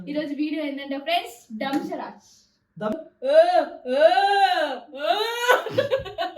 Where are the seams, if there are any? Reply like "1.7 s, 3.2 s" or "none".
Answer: 3.0 s